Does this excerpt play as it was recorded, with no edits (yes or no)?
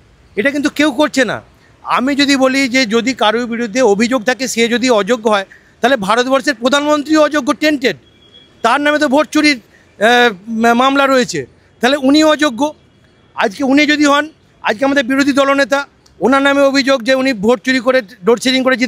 yes